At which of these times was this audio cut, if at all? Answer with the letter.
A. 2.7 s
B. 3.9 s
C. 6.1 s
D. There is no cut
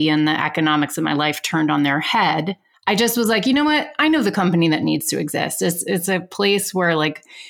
A